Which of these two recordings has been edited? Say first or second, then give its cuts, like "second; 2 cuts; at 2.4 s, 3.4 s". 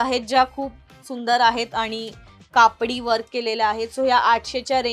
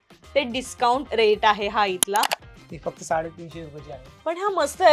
second; 2 cuts; at 1.0 s, 2.5 s